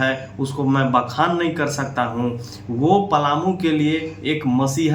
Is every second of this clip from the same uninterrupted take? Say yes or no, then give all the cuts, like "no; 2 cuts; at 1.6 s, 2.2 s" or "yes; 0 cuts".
yes; 0 cuts